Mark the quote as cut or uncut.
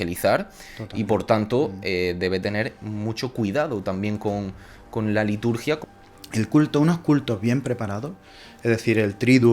cut